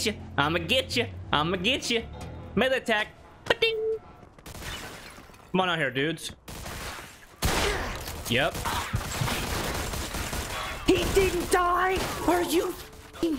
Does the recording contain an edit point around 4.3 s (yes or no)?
yes